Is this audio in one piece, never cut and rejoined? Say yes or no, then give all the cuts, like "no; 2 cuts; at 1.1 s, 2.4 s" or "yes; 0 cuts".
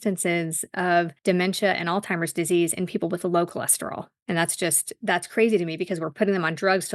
no; 2 cuts; at 1.1 s, 4.1 s